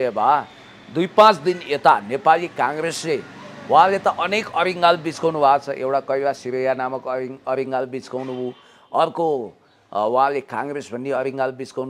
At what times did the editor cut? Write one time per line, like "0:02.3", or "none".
none